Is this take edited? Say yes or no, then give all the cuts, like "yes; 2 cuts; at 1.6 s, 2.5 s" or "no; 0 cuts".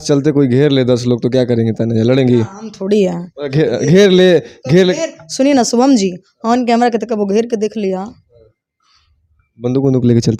no; 0 cuts